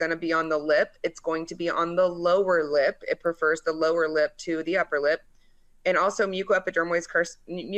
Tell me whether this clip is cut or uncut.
uncut